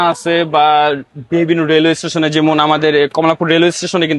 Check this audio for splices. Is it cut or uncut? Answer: uncut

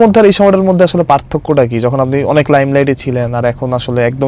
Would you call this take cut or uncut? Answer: uncut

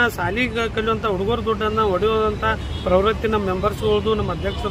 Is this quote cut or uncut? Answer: uncut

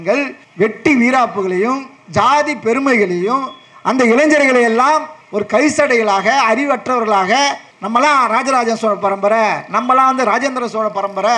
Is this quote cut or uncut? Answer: uncut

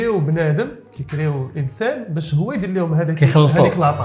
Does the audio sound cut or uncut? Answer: uncut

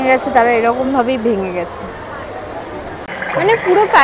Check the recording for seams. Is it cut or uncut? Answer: cut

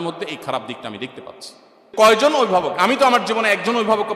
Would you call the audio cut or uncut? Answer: cut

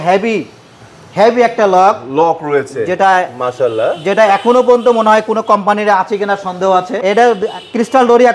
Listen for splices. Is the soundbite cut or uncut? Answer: cut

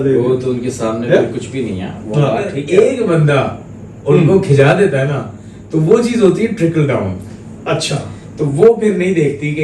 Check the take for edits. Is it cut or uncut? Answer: cut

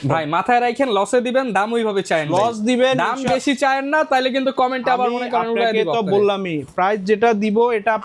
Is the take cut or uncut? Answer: uncut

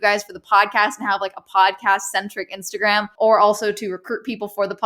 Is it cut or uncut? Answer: cut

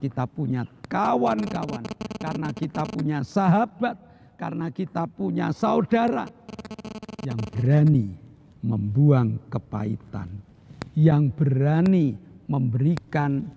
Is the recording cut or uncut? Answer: uncut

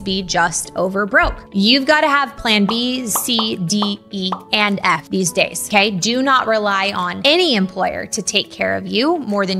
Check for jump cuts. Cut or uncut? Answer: uncut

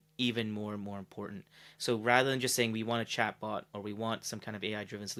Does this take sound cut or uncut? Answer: uncut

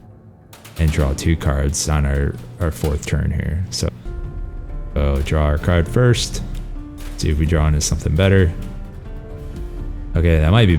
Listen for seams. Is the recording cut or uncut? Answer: cut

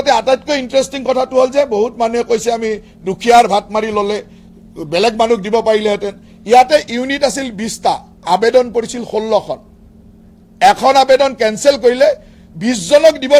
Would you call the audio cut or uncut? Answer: uncut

